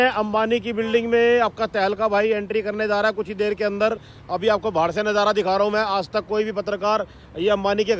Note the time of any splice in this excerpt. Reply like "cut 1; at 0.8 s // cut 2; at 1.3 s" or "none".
none